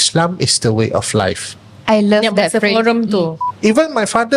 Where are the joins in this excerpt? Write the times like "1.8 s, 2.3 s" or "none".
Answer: 3.4 s